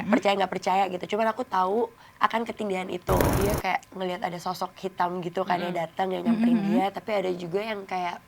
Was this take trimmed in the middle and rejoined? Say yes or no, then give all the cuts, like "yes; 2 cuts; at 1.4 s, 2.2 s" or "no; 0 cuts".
yes; 1 cut; at 3.3 s